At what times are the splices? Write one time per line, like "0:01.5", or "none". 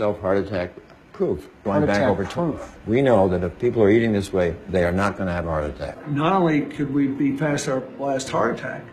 0:06.0